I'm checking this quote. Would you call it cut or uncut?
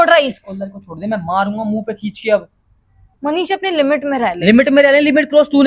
cut